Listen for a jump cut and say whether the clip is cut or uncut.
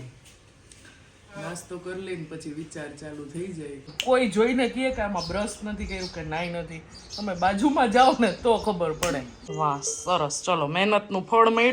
cut